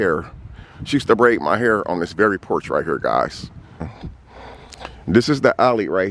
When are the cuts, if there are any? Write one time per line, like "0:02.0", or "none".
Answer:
0:04.0